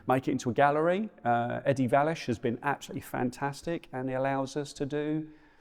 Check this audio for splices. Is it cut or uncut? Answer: uncut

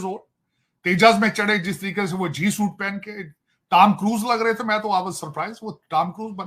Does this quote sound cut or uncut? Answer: uncut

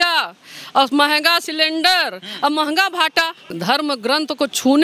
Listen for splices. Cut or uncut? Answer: cut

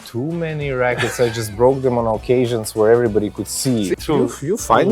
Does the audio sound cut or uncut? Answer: cut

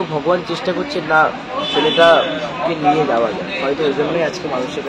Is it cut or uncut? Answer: uncut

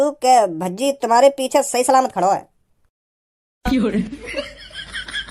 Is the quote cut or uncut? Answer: uncut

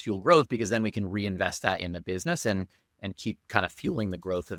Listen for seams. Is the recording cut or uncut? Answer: uncut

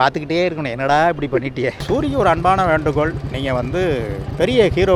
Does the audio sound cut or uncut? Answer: cut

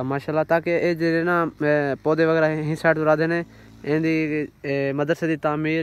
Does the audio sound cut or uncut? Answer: uncut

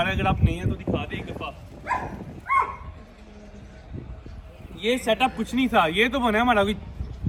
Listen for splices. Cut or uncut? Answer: uncut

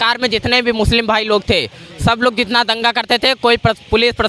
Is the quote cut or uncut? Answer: uncut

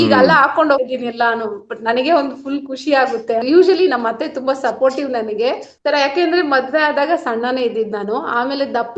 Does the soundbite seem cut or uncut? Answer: cut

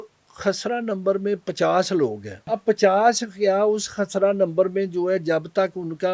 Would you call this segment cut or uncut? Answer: cut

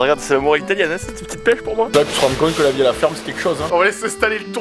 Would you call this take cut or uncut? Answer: cut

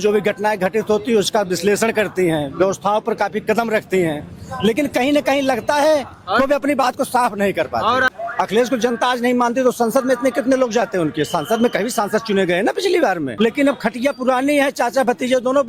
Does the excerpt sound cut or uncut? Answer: cut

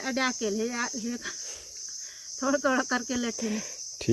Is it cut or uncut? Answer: uncut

